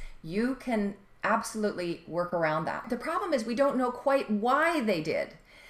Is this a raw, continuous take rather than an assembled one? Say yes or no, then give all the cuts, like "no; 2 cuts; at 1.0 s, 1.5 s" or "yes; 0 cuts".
no; 1 cut; at 2.8 s